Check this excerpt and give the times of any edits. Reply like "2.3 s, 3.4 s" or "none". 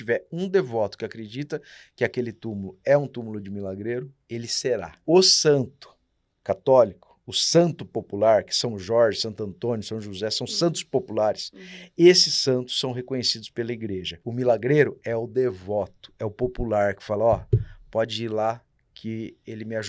4.9 s, 14.1 s